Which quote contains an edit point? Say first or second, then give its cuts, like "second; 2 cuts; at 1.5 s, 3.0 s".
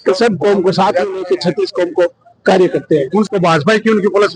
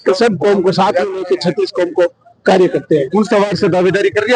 first; 1 cut; at 3.3 s